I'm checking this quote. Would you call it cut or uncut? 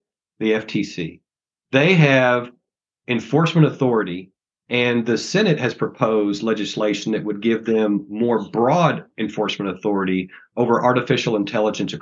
uncut